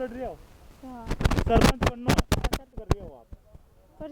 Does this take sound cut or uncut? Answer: uncut